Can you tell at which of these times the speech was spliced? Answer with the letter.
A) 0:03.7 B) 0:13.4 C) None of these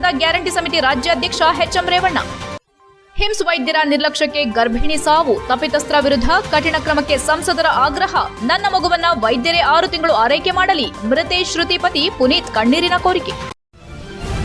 B